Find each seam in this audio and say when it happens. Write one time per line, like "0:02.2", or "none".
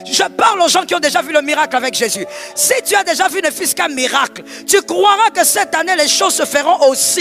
none